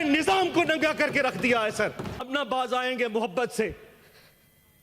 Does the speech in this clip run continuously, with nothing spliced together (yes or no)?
no